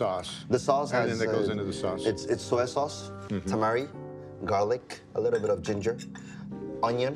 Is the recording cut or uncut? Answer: uncut